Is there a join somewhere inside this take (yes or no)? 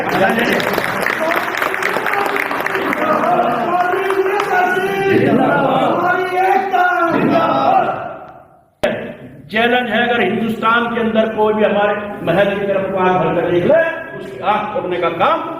yes